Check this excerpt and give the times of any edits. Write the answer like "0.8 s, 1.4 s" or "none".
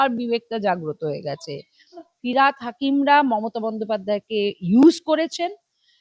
2.0 s